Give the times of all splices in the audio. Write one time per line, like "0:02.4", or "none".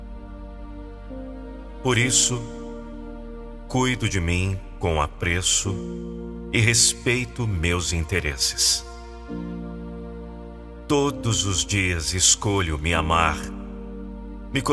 0:09.1
0:10.8